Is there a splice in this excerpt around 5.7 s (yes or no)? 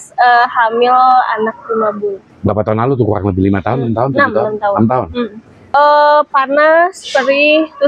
yes